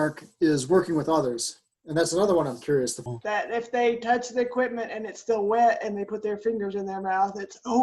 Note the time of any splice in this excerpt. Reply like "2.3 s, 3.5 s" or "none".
3.0 s

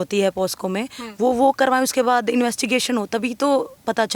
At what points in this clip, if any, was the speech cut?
none

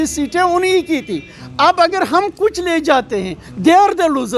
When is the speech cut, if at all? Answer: none

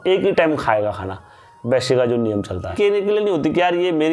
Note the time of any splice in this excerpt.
2.7 s

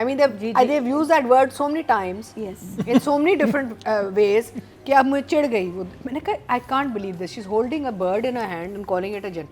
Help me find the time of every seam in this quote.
none

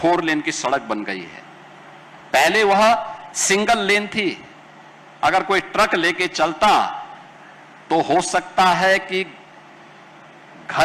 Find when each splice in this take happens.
none

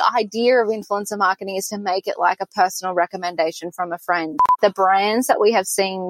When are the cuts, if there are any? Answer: 4.5 s

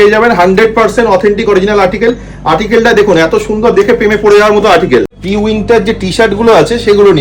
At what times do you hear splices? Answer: 5.2 s

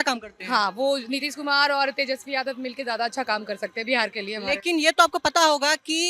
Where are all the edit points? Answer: none

